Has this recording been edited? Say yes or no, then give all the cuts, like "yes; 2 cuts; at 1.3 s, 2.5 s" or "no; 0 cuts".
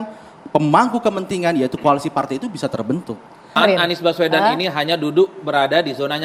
yes; 1 cut; at 3.6 s